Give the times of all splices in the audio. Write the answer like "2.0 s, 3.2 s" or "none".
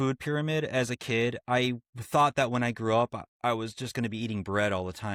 none

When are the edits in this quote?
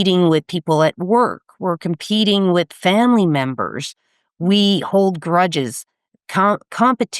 none

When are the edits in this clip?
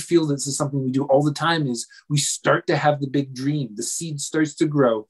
none

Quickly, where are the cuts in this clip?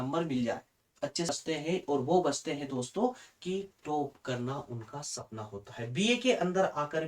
1.3 s

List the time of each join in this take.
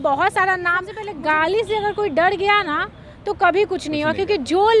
1.1 s

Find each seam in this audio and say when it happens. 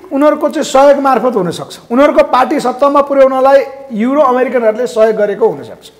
none

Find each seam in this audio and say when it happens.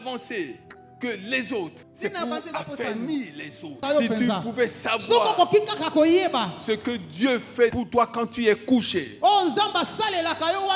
1.8 s, 3.8 s

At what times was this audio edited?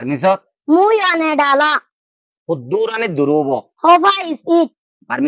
none

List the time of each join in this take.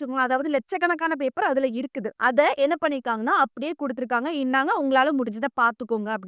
2.0 s

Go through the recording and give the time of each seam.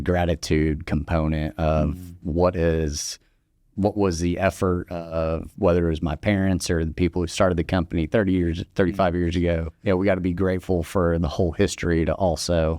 9.7 s

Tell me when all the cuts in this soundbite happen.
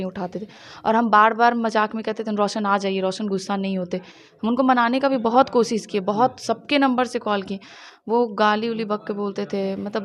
none

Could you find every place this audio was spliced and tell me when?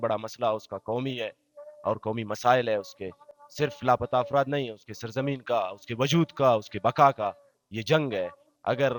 none

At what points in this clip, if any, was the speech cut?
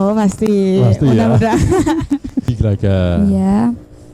2.5 s

